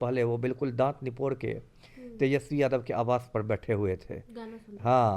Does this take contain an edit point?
no; 0 cuts

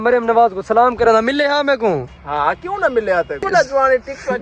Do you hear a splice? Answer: yes; 1 cut; at 3.5 s

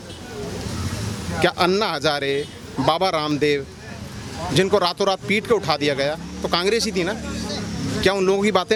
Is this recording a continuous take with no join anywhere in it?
yes; 0 cuts

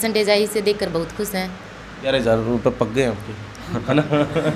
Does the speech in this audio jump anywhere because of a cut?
yes; 1 cut; at 2.0 s

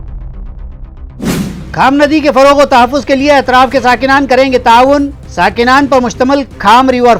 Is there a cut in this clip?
yes; 1 cut; at 1.3 s

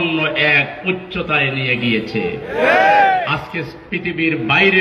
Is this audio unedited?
yes; 0 cuts

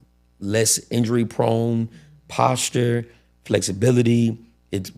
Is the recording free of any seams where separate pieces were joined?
yes; 0 cuts

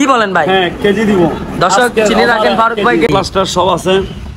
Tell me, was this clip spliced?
yes; 1 cut; at 3.1 s

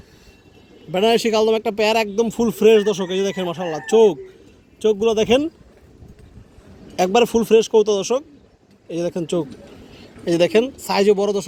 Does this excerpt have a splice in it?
no; 0 cuts

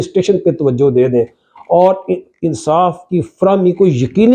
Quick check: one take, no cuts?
yes; 0 cuts

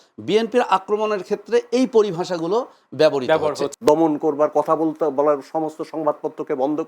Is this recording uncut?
no; 1 cut; at 3.7 s

